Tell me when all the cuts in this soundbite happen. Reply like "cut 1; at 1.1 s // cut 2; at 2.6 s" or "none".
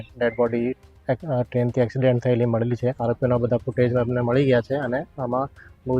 cut 1; at 3.0 s